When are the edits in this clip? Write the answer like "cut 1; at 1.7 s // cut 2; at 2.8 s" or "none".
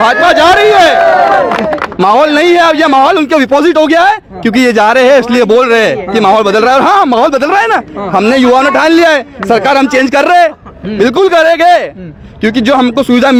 none